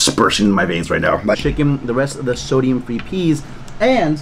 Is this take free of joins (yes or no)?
no